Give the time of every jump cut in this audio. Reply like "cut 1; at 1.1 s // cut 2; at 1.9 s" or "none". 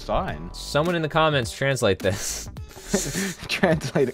none